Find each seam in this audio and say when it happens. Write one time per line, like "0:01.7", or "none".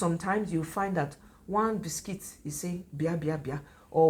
none